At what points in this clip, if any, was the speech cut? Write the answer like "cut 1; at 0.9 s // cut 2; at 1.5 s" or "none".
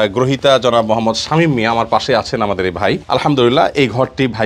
cut 1; at 3.0 s